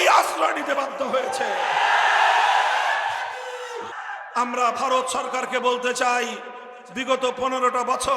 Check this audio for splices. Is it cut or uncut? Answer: cut